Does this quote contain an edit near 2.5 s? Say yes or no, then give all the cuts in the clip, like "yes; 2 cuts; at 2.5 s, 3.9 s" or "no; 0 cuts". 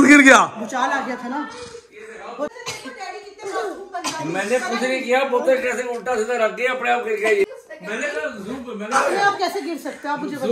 yes; 2 cuts; at 2.5 s, 7.5 s